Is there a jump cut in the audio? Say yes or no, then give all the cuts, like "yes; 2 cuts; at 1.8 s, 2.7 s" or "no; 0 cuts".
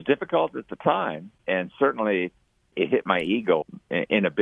yes; 3 cuts; at 1.3 s, 2.7 s, 3.6 s